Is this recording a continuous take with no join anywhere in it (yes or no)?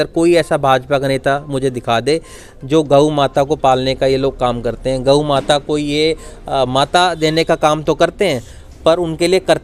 yes